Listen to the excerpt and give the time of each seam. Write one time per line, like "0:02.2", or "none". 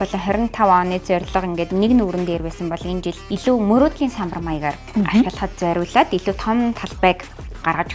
none